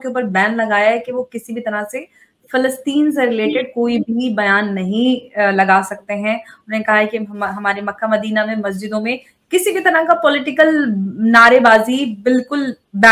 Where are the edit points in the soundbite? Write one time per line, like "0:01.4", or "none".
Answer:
none